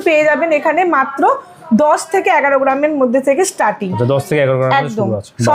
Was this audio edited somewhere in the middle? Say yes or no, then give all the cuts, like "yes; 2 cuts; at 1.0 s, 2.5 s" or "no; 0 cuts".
no; 0 cuts